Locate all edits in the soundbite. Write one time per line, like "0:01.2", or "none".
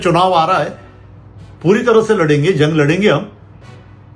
none